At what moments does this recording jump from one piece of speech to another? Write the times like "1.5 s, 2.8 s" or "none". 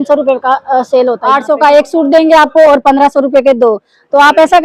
1.2 s